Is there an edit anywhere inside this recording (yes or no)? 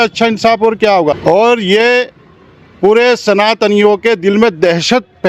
yes